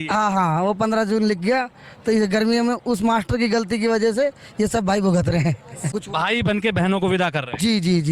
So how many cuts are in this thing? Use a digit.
1